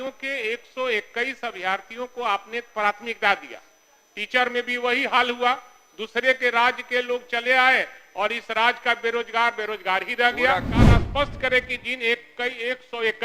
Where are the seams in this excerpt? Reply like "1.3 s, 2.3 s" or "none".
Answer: 10.7 s